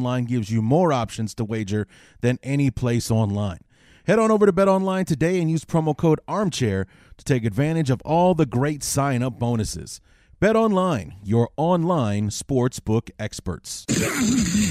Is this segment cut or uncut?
cut